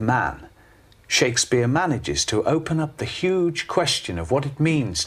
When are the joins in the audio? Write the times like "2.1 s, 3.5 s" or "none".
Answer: 2.6 s